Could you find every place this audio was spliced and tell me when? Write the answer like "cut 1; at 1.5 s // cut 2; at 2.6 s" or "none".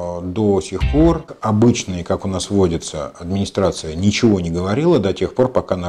cut 1; at 1.3 s

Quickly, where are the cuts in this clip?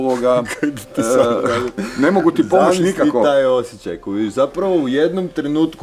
none

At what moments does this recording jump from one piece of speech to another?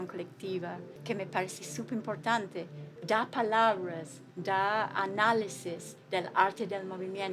cut 1; at 0.9 s // cut 2; at 2.9 s

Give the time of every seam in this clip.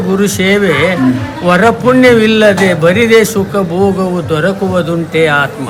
none

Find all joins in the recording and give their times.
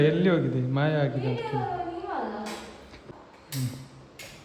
cut 1; at 2.9 s

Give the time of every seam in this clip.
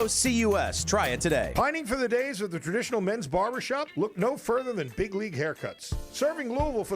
cut 1; at 1.5 s

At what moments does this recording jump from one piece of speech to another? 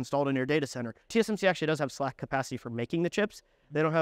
cut 1; at 1.0 s

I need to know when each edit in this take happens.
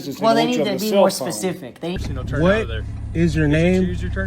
cut 1; at 2.0 s

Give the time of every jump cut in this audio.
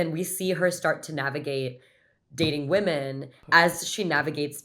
cut 1; at 3.4 s

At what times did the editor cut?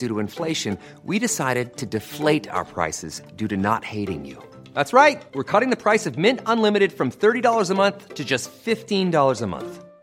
none

